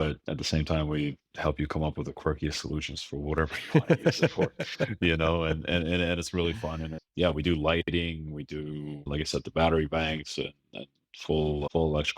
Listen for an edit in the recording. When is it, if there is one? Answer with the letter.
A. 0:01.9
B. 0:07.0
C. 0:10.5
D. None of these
B